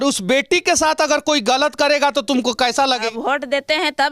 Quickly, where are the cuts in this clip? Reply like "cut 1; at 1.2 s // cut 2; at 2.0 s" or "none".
cut 1; at 3.1 s